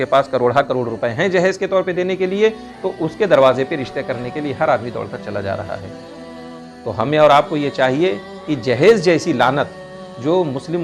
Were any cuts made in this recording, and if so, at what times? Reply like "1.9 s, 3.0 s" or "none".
none